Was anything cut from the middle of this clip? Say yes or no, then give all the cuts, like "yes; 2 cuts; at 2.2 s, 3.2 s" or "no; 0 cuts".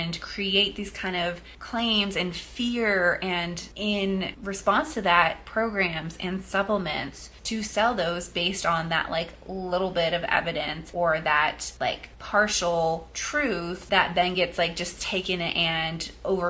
no; 0 cuts